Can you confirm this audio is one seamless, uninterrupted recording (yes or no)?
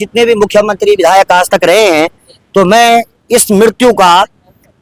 yes